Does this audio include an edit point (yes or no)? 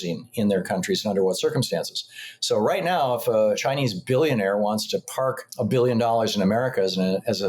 yes